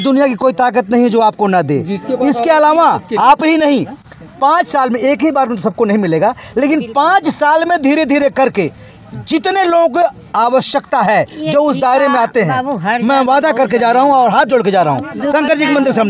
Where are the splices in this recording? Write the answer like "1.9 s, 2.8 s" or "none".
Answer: none